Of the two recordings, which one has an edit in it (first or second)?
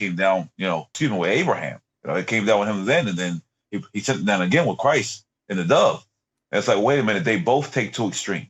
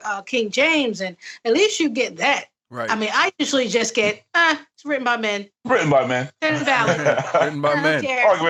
first